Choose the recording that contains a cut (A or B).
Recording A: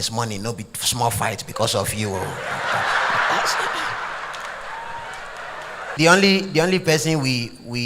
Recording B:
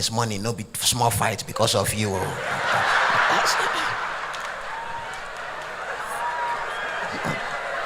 A